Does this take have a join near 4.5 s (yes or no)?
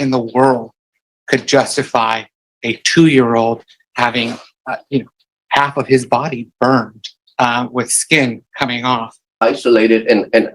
yes